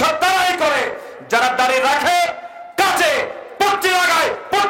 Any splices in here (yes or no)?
no